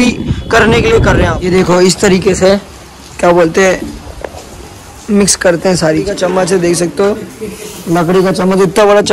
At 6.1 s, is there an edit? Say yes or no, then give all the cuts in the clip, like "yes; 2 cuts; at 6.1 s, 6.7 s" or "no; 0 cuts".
yes; 2 cuts; at 1.4 s, 6.1 s